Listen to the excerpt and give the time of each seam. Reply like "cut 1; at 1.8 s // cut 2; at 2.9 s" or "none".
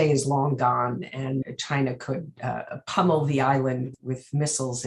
cut 1; at 1.5 s // cut 2; at 3.9 s